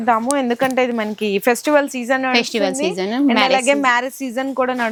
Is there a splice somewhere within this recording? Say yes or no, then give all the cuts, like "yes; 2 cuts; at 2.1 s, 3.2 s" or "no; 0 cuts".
no; 0 cuts